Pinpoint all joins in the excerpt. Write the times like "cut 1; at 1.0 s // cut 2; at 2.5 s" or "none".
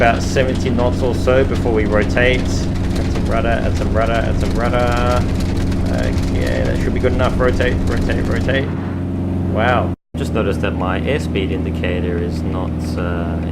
cut 1; at 2.8 s // cut 2; at 5.5 s // cut 3; at 10.0 s